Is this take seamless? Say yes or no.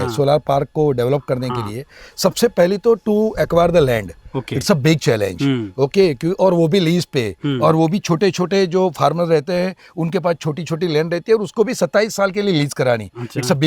yes